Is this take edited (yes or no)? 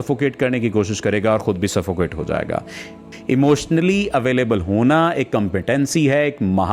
yes